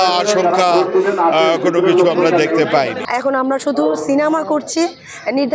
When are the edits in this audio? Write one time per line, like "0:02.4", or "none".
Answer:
0:03.0

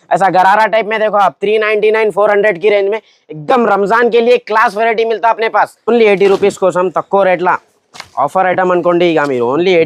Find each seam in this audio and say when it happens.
0:05.9

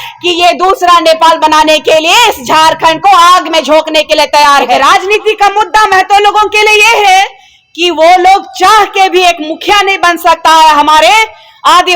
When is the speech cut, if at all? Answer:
0:04.8

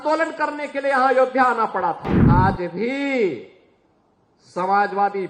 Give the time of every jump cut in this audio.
0:02.1

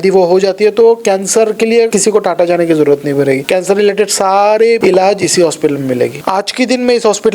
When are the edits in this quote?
0:01.9
0:03.4
0:04.8
0:06.2

